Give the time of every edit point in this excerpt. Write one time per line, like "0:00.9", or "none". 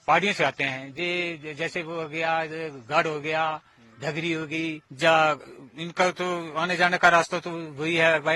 0:04.9